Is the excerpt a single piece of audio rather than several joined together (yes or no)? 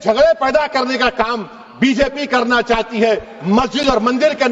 yes